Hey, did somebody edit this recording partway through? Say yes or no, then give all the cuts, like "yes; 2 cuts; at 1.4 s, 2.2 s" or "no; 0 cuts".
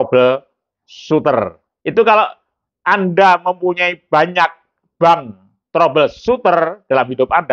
yes; 1 cut; at 1.6 s